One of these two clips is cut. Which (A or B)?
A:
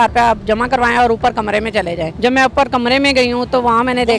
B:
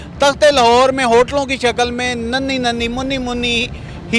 A